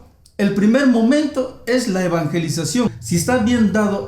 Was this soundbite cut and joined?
yes; 1 cut; at 3.0 s

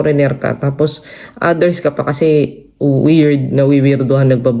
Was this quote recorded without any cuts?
yes; 0 cuts

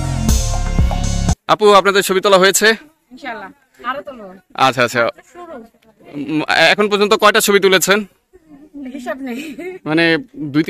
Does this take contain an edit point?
yes; 1 cut; at 1.4 s

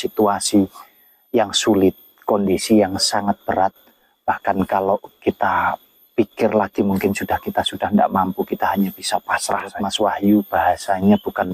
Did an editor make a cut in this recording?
yes; 1 cut; at 9.8 s

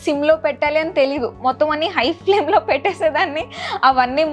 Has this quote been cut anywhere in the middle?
no; 0 cuts

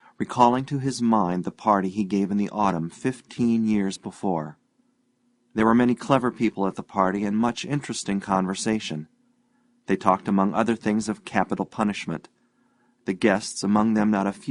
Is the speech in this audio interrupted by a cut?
no; 0 cuts

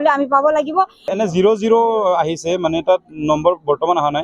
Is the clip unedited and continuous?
no; 1 cut; at 1.1 s

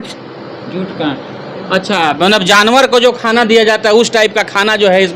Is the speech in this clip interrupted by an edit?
no; 0 cuts

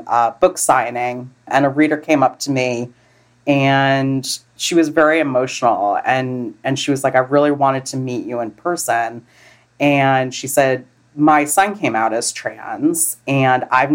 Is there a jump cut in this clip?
yes; 3 cuts; at 1.5 s, 4.4 s, 10.9 s

